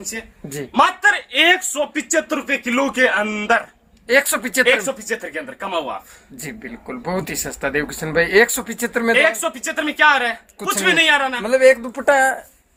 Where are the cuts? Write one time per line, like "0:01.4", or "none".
none